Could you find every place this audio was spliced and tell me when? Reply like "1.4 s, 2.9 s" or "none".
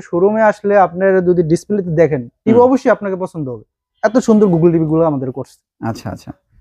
none